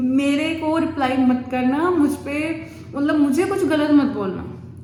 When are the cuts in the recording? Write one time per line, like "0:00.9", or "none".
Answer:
none

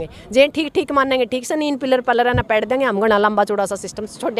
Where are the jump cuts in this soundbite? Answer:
none

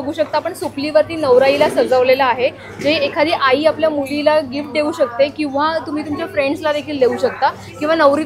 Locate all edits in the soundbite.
none

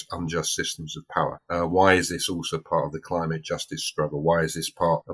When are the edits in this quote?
none

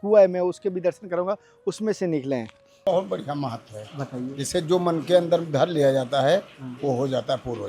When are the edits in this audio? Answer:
0:02.8

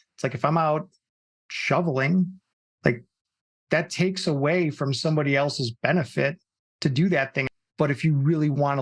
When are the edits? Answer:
0:07.4

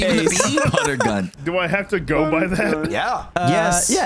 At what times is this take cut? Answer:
0:01.4
0:02.9

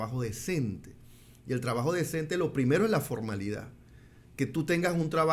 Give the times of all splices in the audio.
none

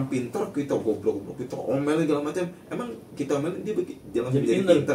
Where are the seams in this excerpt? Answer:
none

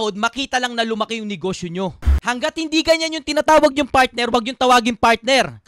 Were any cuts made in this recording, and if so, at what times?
none

